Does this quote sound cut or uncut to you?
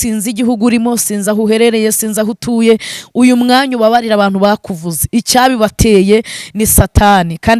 uncut